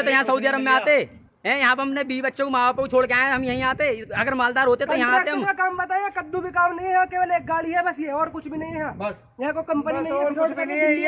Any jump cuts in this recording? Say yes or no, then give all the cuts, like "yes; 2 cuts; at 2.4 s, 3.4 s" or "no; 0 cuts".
no; 0 cuts